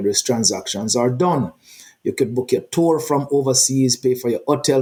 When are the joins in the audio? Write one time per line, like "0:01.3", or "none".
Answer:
none